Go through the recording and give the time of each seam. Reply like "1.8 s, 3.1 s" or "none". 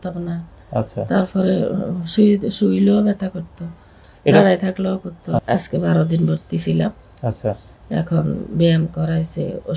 5.4 s

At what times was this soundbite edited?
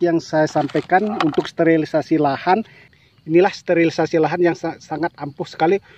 2.8 s

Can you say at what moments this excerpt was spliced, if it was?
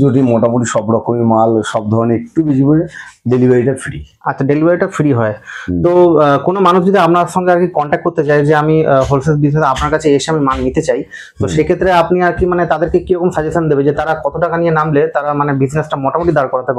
none

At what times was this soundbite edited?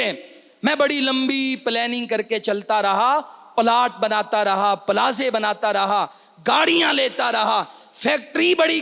none

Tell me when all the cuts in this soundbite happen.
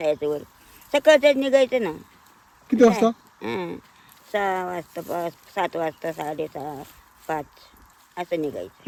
none

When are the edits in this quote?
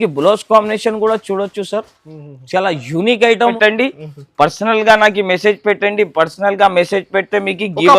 3.5 s

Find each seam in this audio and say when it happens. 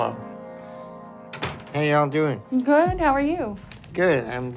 none

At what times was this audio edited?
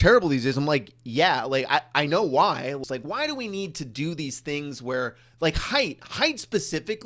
2.8 s

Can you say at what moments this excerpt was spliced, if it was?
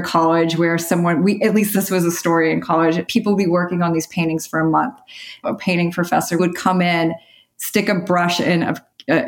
1.7 s, 3.0 s, 5.4 s, 6.4 s

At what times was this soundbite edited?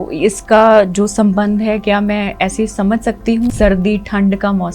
3.5 s

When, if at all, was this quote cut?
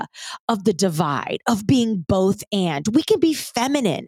none

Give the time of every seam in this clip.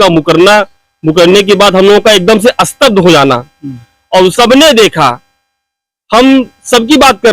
4.3 s

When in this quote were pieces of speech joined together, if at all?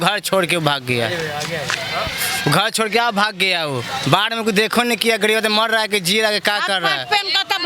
none

